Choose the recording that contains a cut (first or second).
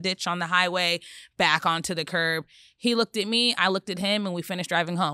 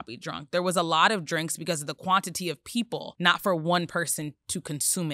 second